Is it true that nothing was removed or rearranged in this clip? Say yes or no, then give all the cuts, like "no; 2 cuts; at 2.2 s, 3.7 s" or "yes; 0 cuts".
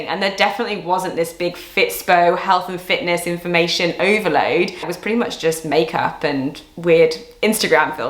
no; 1 cut; at 4.9 s